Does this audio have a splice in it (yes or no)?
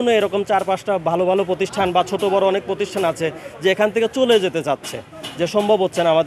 no